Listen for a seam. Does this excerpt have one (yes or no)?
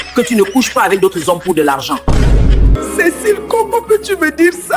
yes